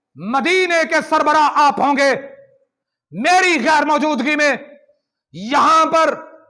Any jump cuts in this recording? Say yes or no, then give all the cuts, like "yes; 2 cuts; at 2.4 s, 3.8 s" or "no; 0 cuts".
no; 0 cuts